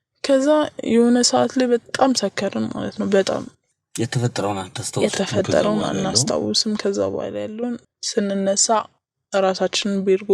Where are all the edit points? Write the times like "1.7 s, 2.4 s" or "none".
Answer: 3.6 s, 7.9 s